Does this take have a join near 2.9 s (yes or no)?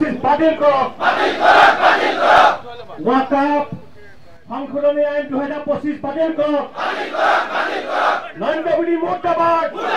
no